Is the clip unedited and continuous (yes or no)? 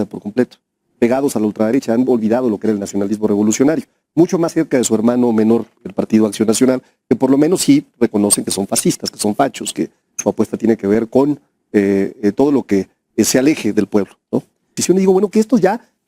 no